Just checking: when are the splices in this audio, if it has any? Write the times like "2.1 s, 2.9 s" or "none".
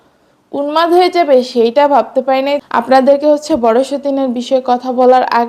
none